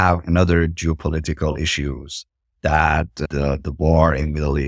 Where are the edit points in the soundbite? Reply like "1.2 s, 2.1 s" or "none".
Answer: 3.3 s